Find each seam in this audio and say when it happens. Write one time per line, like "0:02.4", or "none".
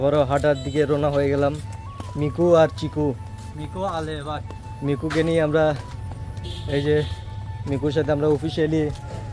none

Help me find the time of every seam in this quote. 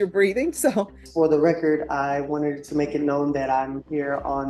0:01.0

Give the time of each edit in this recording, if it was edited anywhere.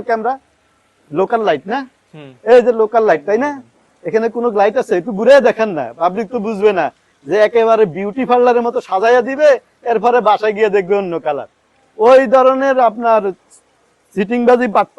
0:12.7

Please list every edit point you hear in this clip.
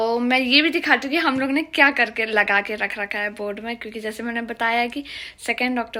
none

